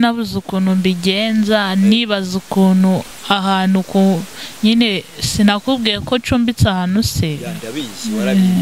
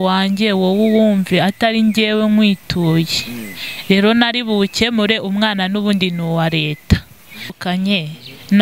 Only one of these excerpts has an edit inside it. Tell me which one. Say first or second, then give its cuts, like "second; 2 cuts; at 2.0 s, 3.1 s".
second; 1 cut; at 7.4 s